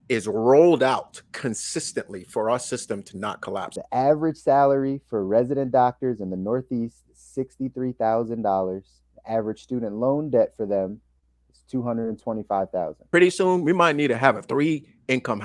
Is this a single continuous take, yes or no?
no